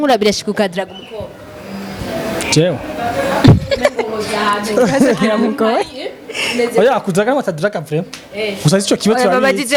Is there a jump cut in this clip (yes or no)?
no